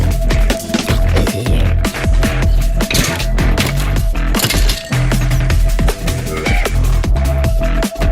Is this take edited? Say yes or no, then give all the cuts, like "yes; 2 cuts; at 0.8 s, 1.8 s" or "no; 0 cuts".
yes; 1 cut; at 7.2 s